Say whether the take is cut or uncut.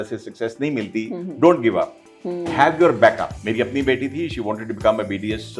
cut